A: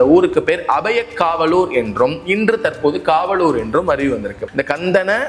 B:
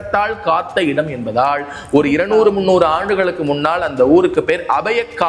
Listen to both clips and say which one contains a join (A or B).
A